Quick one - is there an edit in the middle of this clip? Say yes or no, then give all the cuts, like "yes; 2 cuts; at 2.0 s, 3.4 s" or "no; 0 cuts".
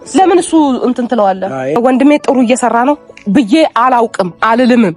yes; 1 cut; at 1.8 s